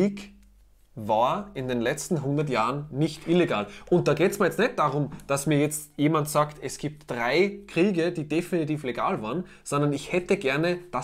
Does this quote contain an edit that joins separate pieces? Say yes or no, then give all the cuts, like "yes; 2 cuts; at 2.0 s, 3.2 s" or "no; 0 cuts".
no; 0 cuts